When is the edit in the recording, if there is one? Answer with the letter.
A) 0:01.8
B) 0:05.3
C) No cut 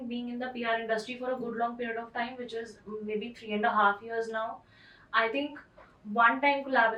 C